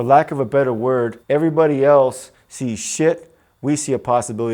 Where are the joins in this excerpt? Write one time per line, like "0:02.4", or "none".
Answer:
0:01.2